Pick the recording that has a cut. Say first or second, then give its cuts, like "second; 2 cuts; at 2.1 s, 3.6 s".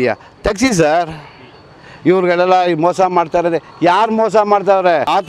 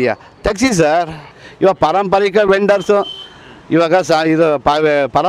second; 1 cut; at 1.5 s